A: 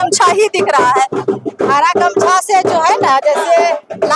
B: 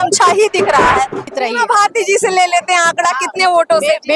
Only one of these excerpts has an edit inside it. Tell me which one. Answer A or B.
B